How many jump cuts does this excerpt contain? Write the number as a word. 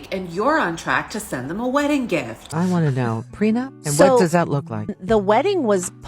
two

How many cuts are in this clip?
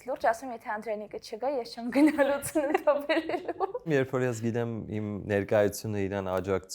one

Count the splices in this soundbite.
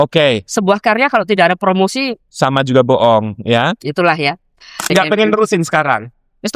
one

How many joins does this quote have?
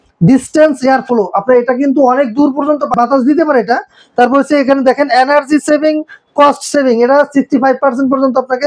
one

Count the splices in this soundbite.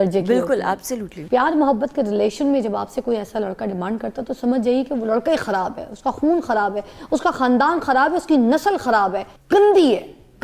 two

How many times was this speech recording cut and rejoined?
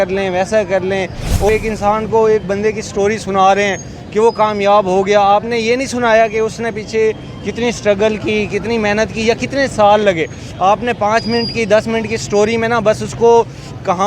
one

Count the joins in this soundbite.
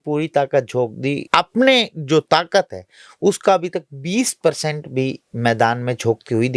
one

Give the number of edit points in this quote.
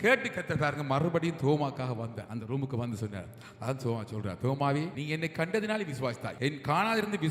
three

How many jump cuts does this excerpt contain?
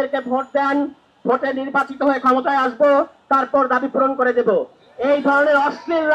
zero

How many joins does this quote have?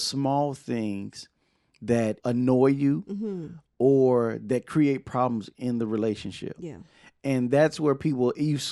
one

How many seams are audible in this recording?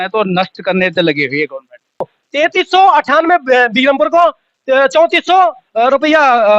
one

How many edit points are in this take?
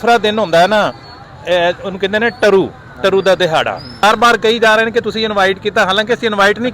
one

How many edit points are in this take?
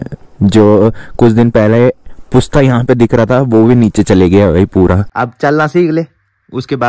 one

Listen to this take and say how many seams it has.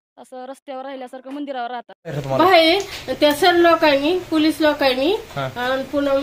one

